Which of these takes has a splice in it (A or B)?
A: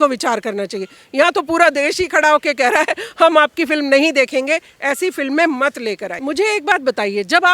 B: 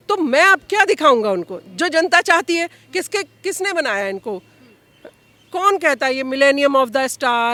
A